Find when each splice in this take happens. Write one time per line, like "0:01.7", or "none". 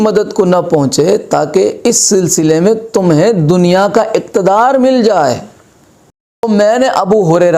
0:06.4